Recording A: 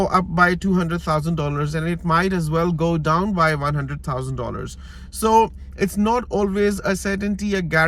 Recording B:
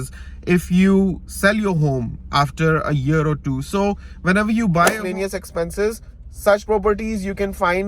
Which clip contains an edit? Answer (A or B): B